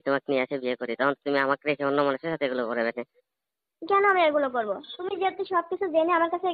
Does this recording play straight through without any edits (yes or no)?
yes